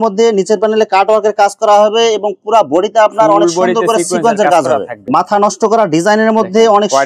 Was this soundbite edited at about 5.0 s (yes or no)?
yes